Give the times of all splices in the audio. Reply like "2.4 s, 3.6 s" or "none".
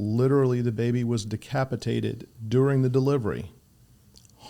none